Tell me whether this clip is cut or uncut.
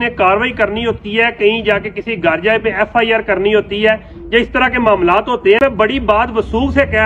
cut